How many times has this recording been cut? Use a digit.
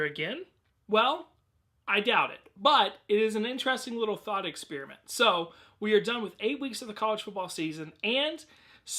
1